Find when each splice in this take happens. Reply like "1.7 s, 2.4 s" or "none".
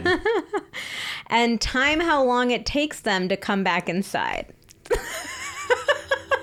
none